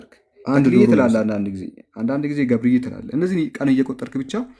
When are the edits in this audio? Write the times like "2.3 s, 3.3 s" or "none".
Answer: 0.9 s